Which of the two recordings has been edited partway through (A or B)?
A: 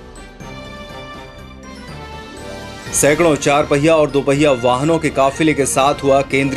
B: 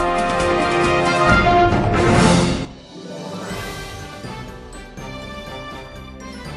A